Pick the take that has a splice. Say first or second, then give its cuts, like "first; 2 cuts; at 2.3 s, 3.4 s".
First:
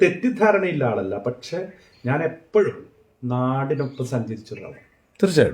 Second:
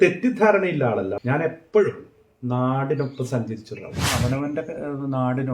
second; 2 cuts; at 1.2 s, 4.1 s